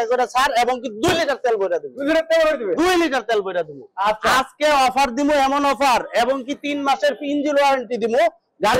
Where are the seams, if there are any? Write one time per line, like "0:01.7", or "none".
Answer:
none